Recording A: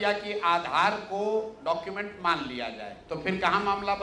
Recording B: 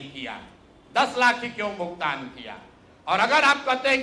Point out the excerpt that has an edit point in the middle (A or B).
A